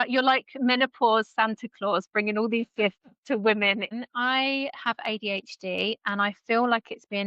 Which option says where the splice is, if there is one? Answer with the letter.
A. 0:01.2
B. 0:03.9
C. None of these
B